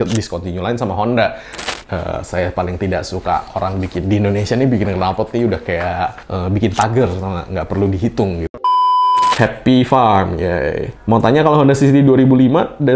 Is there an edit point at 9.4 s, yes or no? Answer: yes